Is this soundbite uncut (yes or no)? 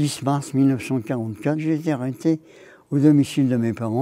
no